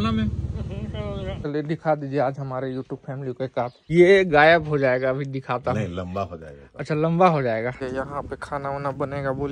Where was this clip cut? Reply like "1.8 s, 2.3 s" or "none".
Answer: 1.4 s, 3.9 s, 7.8 s